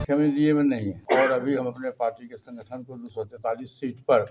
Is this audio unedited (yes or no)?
no